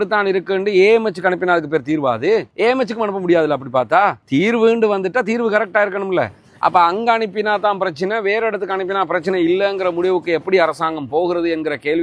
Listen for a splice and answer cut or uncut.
uncut